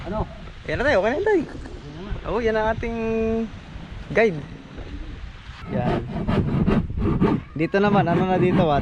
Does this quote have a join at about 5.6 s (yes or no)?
yes